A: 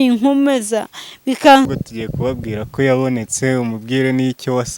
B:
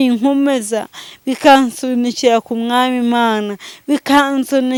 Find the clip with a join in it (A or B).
A